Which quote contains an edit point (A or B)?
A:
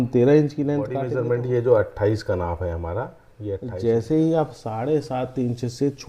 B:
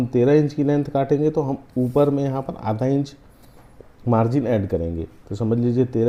A